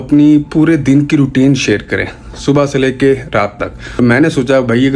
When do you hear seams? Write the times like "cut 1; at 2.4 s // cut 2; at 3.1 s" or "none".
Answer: none